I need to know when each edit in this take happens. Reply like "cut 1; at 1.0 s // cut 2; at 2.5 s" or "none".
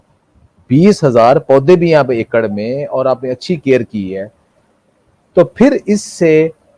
none